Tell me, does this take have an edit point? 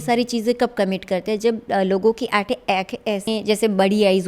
yes; 1 cut; at 3.3 s

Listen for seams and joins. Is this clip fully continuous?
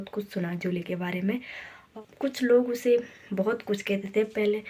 yes; 0 cuts

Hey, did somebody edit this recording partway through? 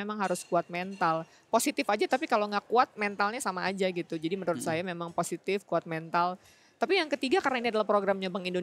no; 0 cuts

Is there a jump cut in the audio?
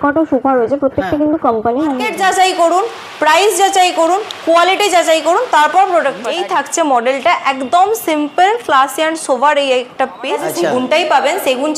yes; 3 cuts; at 2.1 s, 6.3 s, 10.4 s

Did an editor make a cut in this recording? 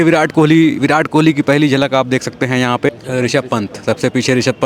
yes; 1 cut; at 2.9 s

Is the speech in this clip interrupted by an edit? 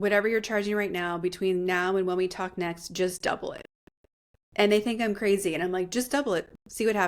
no; 0 cuts

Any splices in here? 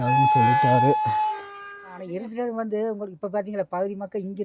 yes; 1 cut; at 2.2 s

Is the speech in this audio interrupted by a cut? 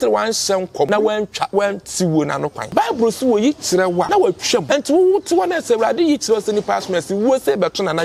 yes; 3 cuts; at 0.9 s, 2.6 s, 4.3 s

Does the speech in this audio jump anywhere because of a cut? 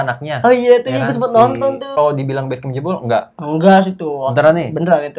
yes; 1 cut; at 2.0 s

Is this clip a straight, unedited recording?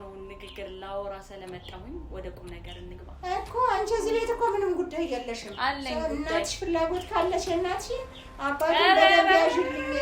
yes; 0 cuts

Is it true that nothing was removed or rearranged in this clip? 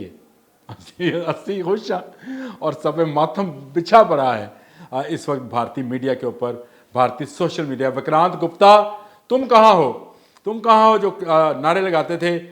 yes; 0 cuts

